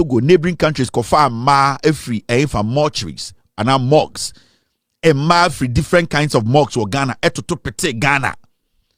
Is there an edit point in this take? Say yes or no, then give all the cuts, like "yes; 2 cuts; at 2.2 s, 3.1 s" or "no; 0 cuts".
no; 0 cuts